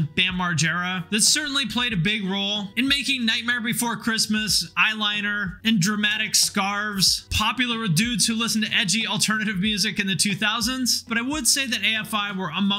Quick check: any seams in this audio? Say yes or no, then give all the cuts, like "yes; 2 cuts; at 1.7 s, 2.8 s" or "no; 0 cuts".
yes; 1 cut; at 11.1 s